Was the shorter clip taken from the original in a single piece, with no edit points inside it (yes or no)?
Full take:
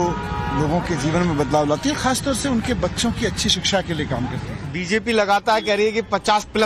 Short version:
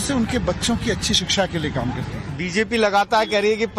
yes